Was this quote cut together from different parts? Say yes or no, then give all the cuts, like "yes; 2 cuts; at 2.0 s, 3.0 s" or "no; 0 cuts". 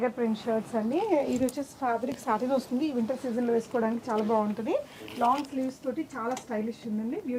no; 0 cuts